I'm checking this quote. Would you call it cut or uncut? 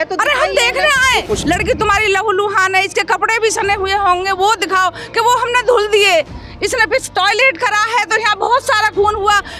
cut